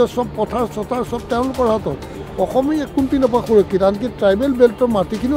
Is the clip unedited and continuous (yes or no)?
yes